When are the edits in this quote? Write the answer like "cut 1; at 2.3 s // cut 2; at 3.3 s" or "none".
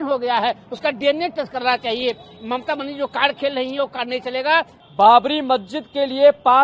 cut 1; at 4.8 s